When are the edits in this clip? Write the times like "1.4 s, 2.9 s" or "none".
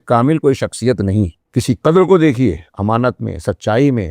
1.4 s